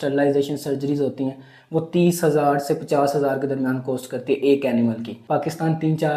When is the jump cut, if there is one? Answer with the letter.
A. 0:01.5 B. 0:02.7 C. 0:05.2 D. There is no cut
C